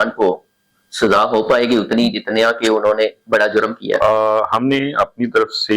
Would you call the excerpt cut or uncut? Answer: uncut